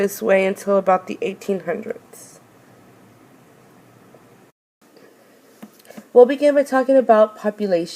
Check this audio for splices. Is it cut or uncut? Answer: uncut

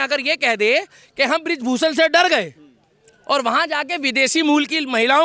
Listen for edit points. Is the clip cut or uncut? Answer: uncut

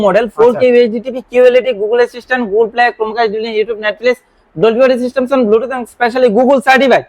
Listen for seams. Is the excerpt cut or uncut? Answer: uncut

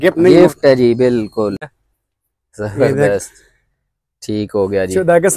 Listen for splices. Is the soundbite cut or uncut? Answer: cut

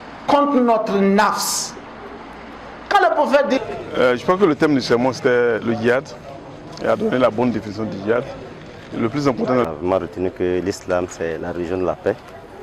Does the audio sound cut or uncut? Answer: cut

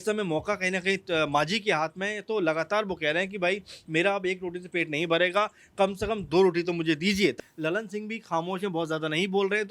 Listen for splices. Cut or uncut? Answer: cut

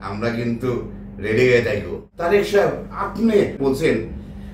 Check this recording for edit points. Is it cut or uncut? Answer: cut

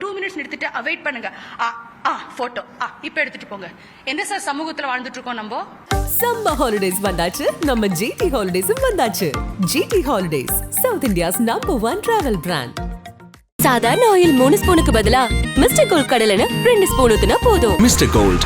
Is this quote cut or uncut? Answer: cut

